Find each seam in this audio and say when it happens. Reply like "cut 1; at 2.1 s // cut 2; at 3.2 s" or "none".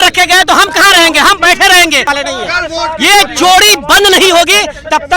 cut 1; at 2.1 s